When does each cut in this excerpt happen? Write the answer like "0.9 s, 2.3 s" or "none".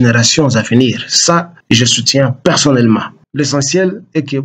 1.5 s, 3.2 s

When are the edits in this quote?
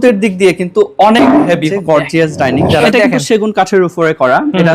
1.7 s, 2.9 s

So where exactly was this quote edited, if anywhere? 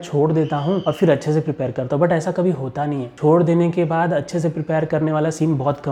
none

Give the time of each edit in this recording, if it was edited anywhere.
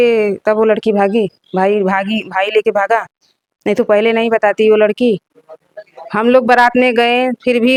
none

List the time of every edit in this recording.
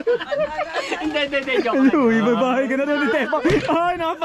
none

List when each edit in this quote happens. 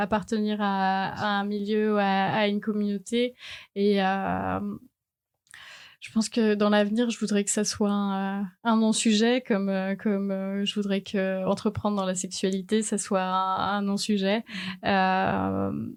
none

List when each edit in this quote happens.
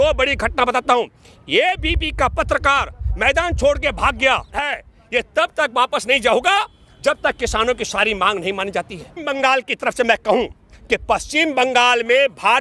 4.6 s, 9.2 s

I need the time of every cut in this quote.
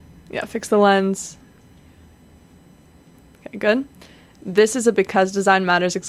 none

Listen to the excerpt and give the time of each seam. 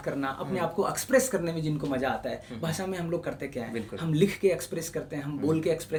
none

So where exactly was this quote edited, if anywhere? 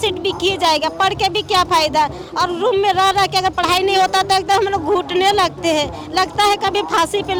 none

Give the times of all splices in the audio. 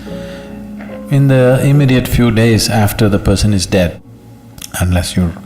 4.0 s

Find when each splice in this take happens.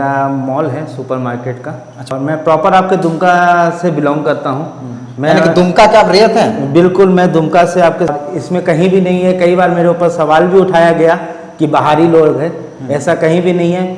2.1 s, 8.1 s

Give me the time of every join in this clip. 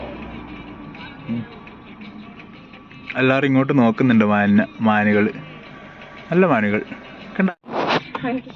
7.5 s

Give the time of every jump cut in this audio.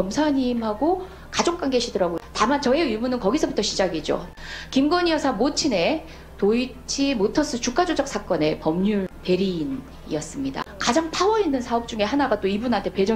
2.2 s, 4.3 s, 9.1 s, 10.7 s

